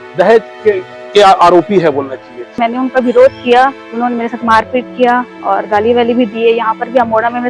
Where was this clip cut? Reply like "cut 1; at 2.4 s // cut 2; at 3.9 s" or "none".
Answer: cut 1; at 2.6 s